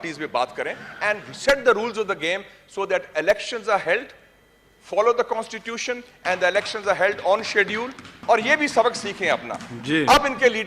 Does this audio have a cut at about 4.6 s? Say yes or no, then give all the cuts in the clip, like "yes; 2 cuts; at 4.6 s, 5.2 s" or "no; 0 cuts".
no; 1 cut; at 8.1 s